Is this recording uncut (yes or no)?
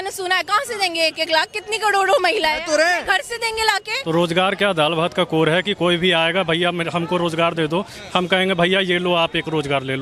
no